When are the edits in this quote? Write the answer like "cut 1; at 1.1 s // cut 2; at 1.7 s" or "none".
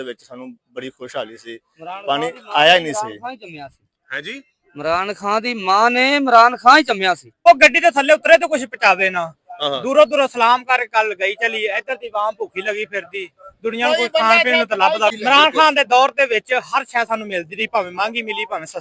cut 1; at 7.5 s // cut 2; at 15.1 s